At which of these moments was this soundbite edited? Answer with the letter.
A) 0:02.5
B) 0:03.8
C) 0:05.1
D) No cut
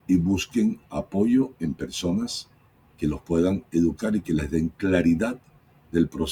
D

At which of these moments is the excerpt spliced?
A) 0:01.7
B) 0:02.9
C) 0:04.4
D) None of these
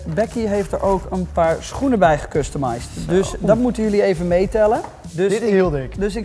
D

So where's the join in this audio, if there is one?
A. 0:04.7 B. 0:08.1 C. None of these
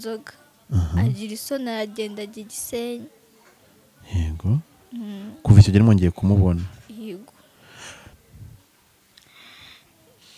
B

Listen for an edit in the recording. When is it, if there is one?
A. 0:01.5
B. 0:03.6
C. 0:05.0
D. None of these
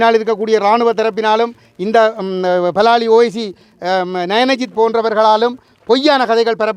D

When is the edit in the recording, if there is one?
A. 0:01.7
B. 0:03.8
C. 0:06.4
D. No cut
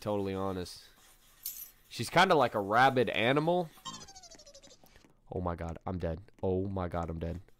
B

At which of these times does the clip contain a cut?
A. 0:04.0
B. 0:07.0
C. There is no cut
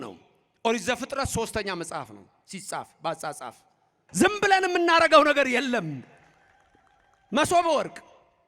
A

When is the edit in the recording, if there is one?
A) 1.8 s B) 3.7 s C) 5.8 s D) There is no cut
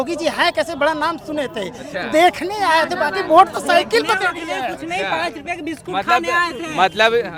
D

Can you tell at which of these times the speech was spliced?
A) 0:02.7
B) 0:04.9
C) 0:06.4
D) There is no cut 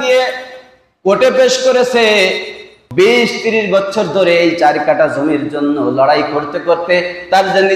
A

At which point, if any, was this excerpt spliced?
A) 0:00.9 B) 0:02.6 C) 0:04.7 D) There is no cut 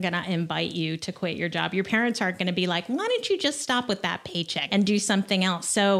C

